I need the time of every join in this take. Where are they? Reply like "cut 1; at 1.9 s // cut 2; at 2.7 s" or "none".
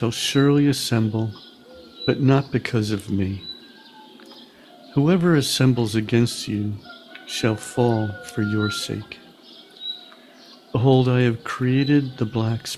cut 1; at 3.5 s // cut 2; at 4.9 s // cut 3; at 9.1 s // cut 4; at 10.7 s